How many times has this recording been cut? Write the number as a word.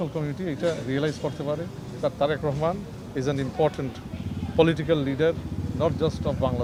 zero